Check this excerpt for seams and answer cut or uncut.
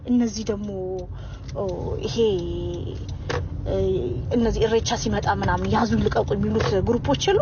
uncut